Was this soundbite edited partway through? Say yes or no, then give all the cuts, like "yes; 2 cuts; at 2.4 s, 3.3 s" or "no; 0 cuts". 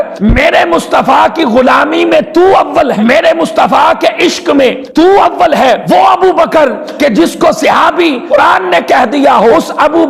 yes; 1 cut; at 5.8 s